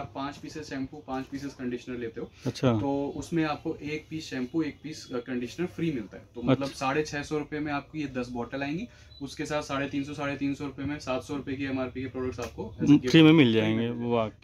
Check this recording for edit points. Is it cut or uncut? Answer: uncut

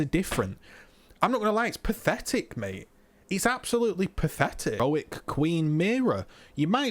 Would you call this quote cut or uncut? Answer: cut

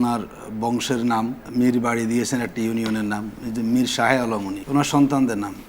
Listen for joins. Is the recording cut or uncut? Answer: cut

